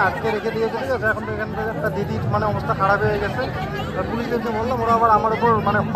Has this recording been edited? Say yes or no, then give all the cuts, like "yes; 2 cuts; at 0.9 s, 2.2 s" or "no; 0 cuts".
no; 0 cuts